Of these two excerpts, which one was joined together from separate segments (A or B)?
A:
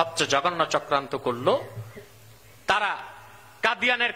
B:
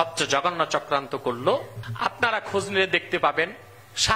B